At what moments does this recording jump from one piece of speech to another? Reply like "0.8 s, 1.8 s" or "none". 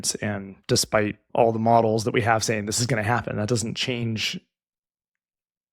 1.2 s